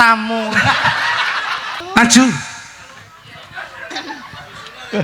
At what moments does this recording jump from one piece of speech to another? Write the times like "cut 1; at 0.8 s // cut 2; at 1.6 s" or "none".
cut 1; at 1.8 s